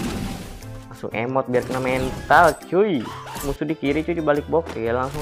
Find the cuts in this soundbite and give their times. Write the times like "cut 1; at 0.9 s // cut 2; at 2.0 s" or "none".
cut 1; at 3.5 s